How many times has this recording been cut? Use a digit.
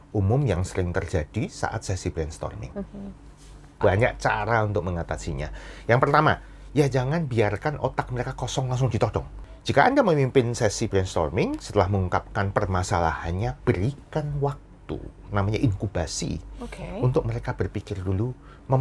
2